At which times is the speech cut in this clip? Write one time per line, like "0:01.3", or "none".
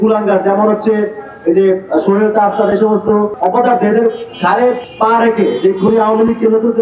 0:03.3
0:04.9